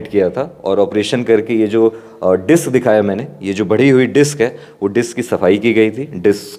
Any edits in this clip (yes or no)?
no